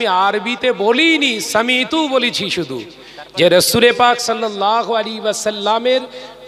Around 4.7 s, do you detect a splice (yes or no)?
no